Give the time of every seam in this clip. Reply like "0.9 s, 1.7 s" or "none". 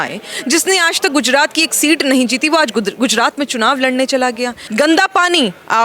4.6 s